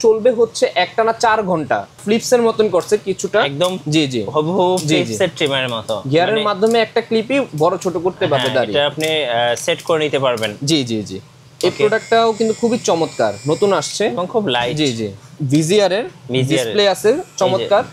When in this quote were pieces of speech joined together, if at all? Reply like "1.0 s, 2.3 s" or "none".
2.0 s, 15.3 s